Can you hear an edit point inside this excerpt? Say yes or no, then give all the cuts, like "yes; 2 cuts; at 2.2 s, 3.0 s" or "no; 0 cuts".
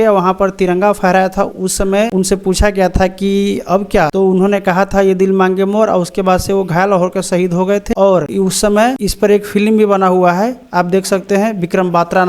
yes; 4 cuts; at 2.1 s, 4.1 s, 7.9 s, 9.0 s